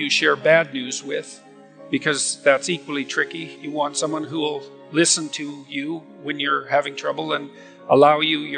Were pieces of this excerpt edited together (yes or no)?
yes